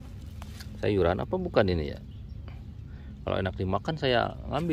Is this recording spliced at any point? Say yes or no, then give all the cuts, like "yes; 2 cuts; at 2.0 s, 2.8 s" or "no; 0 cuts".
no; 0 cuts